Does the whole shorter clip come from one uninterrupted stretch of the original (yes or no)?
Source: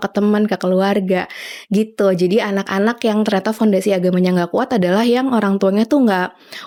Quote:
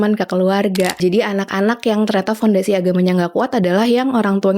no